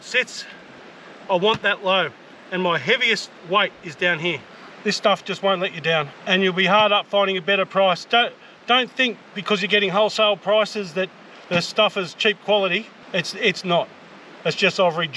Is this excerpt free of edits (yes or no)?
no